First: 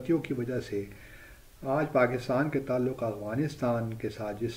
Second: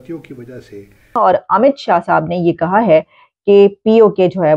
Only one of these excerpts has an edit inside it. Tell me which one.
second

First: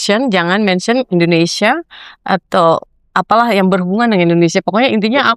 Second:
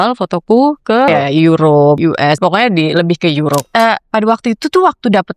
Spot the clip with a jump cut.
second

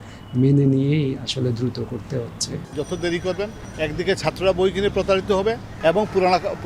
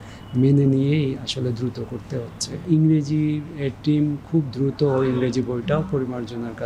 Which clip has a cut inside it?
first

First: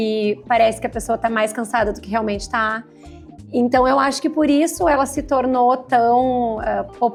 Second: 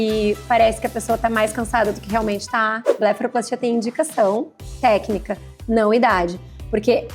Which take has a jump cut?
second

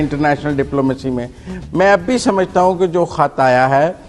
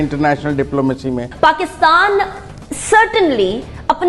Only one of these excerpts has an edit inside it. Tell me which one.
second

